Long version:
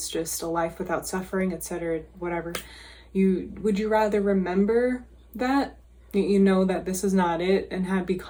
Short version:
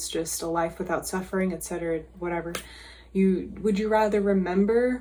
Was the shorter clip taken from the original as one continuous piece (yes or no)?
yes